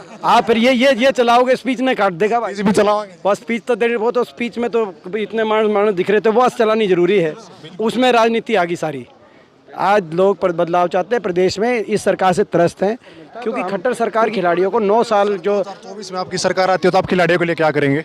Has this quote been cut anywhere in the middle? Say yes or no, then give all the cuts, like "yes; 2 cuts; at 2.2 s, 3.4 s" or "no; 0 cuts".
yes; 1 cut; at 14.3 s